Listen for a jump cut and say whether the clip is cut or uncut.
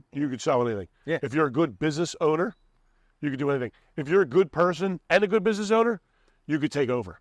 uncut